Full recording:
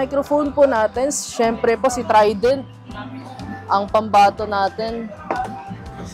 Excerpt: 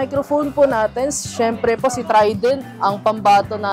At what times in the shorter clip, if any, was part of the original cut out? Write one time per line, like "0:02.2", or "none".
0:02.7

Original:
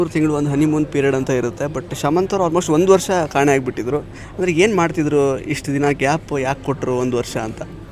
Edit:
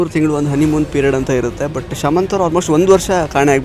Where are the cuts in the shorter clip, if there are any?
none

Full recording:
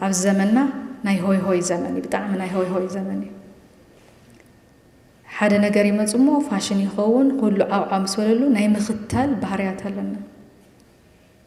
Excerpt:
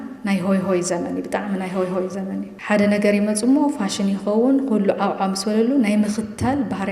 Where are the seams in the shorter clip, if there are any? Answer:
0:02.5

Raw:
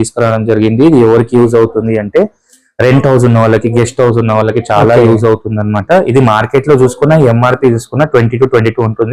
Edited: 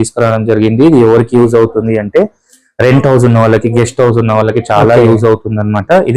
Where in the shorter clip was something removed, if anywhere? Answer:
none

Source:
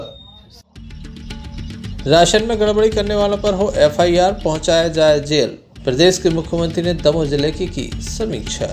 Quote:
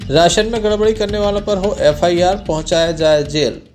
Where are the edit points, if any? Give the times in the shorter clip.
none

